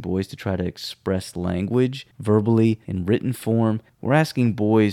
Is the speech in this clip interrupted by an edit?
yes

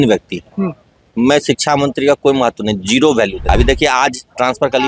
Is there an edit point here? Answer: yes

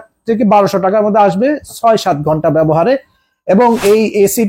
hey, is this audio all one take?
yes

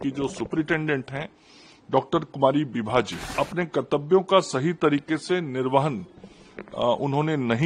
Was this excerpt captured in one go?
no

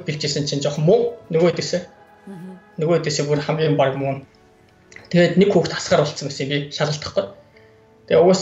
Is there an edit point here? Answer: no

